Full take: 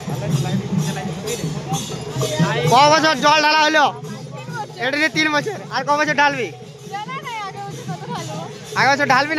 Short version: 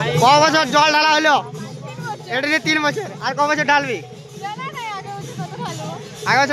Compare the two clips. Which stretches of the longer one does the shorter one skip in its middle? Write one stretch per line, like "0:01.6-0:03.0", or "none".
none